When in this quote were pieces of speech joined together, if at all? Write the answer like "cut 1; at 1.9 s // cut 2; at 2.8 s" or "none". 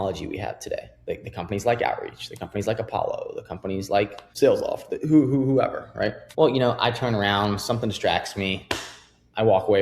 cut 1; at 0.9 s // cut 2; at 4.2 s // cut 3; at 6.2 s